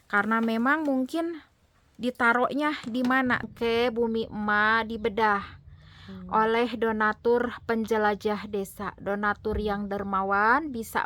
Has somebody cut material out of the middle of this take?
yes; 1 cut; at 3.5 s

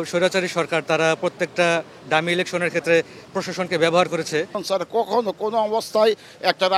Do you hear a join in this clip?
yes; 1 cut; at 4.6 s

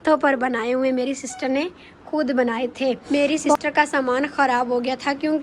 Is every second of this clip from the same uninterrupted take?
no; 1 cut; at 3.0 s

